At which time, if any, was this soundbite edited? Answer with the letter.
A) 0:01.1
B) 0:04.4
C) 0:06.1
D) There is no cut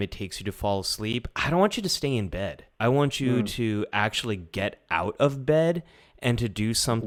D